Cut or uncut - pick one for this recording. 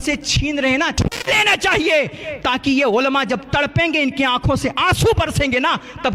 cut